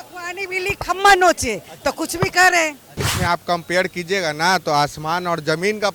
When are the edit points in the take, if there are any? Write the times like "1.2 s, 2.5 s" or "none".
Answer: 3.1 s